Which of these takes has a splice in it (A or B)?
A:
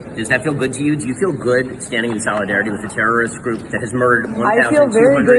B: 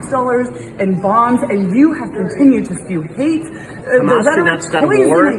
A